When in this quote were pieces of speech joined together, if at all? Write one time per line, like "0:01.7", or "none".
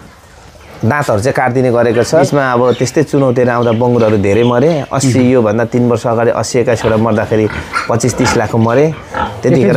0:02.2